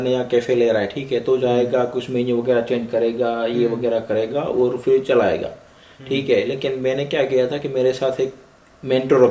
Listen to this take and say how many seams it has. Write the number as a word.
zero